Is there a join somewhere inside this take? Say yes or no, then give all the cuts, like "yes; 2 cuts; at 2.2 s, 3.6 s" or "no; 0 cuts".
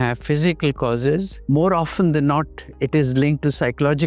yes; 1 cut; at 1.3 s